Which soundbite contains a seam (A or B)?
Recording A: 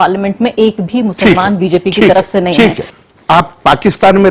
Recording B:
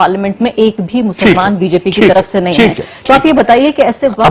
A